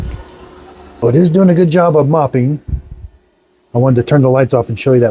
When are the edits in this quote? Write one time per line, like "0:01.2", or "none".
0:01.0